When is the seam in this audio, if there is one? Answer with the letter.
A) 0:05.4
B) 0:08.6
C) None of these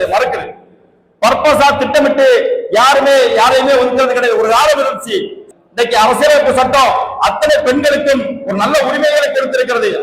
A